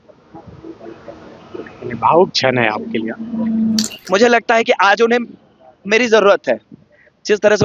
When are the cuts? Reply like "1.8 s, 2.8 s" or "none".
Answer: 3.9 s